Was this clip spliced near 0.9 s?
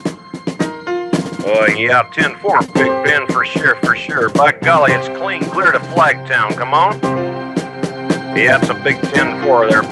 no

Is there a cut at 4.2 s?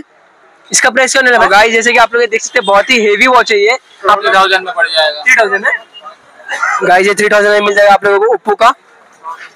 yes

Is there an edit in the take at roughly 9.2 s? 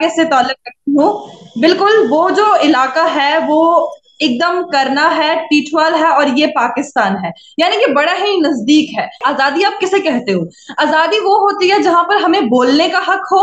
yes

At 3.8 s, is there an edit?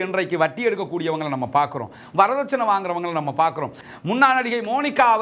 yes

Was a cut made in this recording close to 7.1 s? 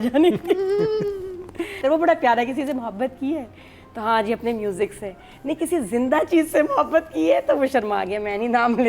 no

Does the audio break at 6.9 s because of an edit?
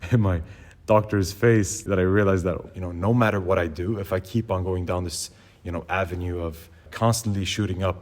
yes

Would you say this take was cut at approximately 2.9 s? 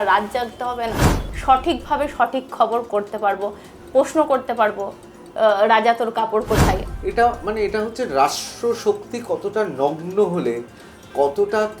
no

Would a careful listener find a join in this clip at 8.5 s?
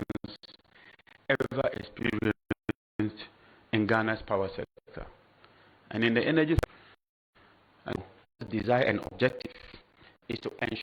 yes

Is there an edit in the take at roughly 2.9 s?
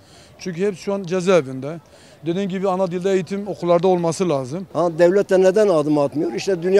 no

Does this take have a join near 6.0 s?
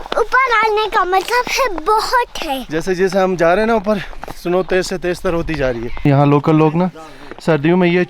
yes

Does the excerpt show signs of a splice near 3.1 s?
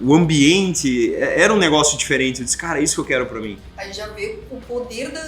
no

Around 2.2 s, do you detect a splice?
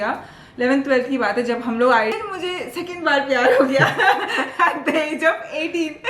yes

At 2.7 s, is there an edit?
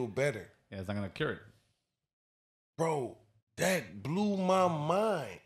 no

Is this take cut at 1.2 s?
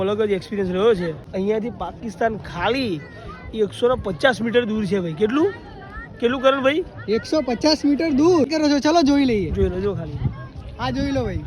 yes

